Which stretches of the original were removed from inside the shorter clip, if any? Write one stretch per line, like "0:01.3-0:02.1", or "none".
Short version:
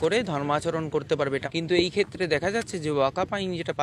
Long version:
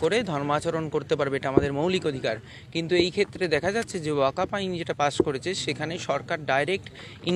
0:01.4-0:02.7